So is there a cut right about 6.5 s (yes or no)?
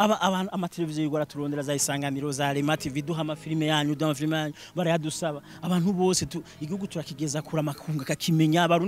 no